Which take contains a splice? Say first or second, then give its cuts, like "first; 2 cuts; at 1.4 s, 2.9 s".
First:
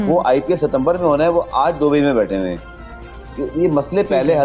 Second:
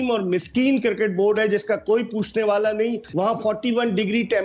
second; 1 cut; at 3.0 s